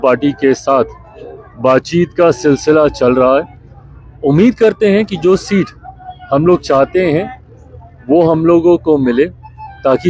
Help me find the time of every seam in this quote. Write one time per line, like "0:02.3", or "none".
none